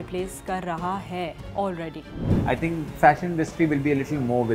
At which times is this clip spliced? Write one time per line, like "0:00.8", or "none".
0:02.2